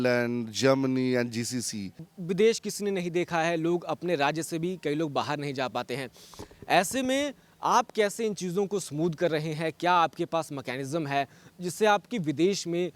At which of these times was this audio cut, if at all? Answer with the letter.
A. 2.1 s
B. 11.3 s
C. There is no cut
A